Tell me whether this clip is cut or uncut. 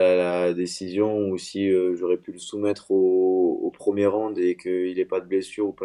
uncut